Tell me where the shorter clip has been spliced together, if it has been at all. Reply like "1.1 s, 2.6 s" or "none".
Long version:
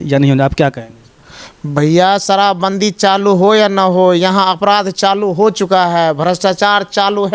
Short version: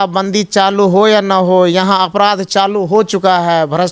none